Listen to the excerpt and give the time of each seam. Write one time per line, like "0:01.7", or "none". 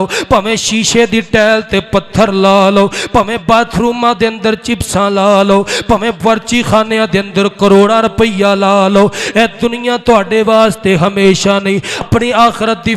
0:12.1